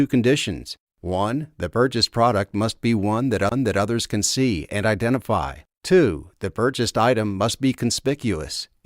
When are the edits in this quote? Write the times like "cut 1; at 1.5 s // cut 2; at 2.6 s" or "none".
cut 1; at 3.5 s

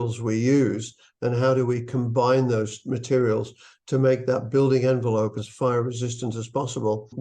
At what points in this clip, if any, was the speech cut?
cut 1; at 5.3 s

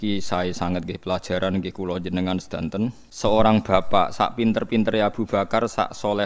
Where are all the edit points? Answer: cut 1; at 3.1 s

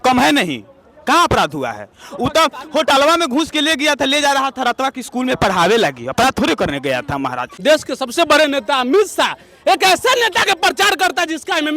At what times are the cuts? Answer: cut 1; at 7.4 s

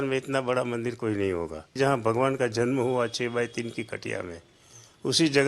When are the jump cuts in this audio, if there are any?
cut 1; at 1.8 s

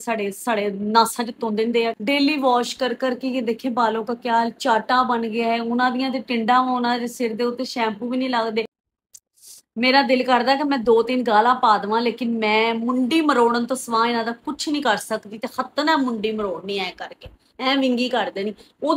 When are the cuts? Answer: cut 1; at 2.0 s // cut 2; at 8.9 s

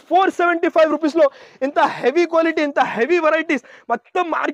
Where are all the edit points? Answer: none

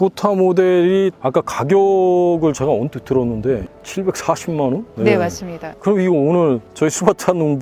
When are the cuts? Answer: cut 1; at 1.2 s // cut 2; at 3.7 s

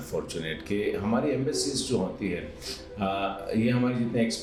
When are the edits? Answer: none

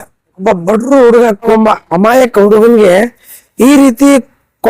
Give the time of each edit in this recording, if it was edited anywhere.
cut 1; at 1.5 s

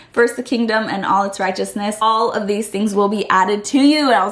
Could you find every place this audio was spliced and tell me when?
cut 1; at 2.0 s

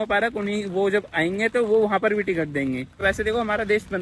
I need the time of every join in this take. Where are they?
cut 1; at 3.0 s

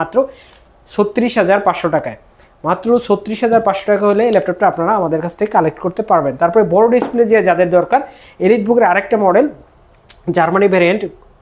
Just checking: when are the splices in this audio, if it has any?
none

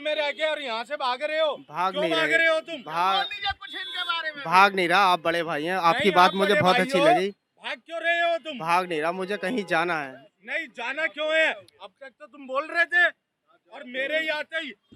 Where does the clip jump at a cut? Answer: none

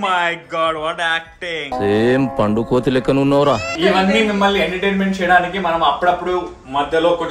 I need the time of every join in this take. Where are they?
none

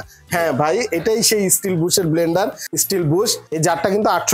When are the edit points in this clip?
cut 1; at 2.6 s // cut 2; at 3.4 s

